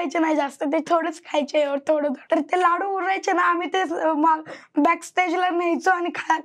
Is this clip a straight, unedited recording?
yes; 0 cuts

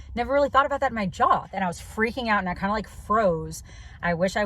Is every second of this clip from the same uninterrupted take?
no; 1 cut; at 1.5 s

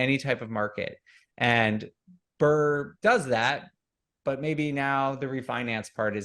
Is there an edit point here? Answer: yes; 1 cut; at 2.9 s

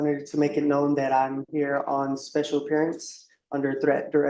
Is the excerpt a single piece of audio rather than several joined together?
yes; 0 cuts

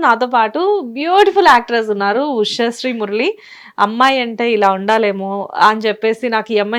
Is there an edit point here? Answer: no; 0 cuts

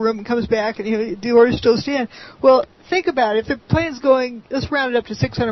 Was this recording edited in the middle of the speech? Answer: no; 0 cuts

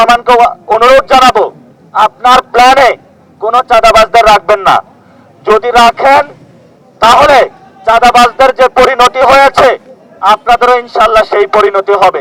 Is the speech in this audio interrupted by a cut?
no; 0 cuts

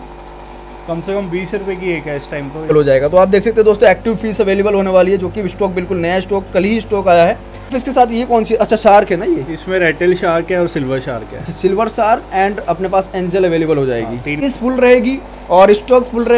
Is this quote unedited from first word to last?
no; 3 cuts; at 2.7 s, 7.8 s, 14.4 s

